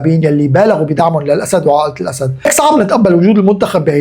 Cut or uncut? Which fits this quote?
cut